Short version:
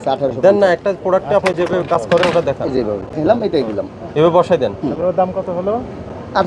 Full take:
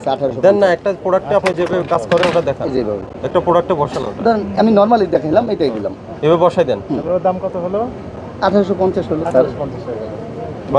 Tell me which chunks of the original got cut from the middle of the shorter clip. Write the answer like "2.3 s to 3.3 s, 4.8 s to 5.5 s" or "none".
3.2 s to 5.2 s